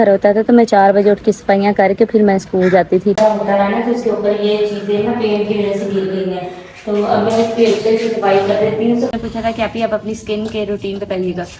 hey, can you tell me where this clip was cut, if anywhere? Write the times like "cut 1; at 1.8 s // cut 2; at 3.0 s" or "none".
cut 1; at 3.2 s // cut 2; at 9.1 s